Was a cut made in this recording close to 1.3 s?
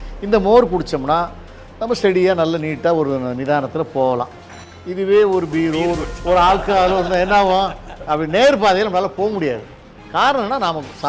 no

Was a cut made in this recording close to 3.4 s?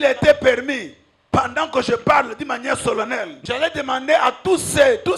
yes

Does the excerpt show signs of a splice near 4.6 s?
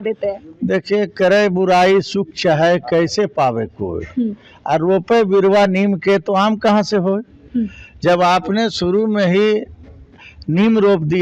no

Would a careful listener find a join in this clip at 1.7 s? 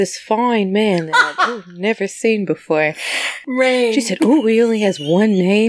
no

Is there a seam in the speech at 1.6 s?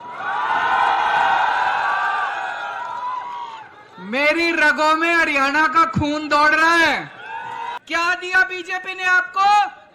no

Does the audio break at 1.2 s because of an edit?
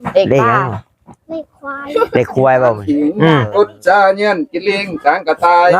no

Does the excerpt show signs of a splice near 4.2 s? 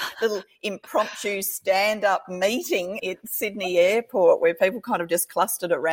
no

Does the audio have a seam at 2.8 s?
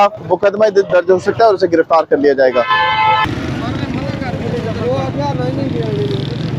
no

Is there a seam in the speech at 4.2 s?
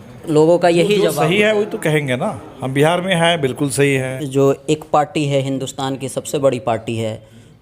yes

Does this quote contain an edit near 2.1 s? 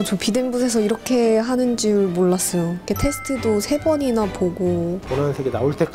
no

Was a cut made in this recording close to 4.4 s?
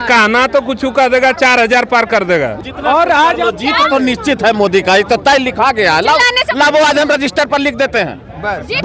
no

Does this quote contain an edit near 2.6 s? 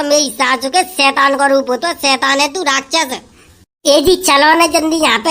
no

